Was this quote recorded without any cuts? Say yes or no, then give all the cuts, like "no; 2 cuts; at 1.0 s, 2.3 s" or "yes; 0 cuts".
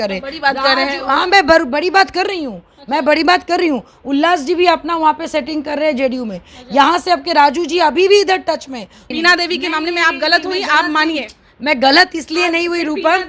no; 1 cut; at 9.1 s